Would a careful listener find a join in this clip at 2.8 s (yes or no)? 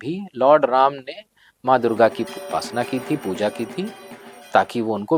no